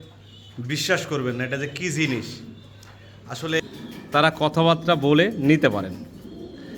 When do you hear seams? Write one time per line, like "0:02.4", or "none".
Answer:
0:03.6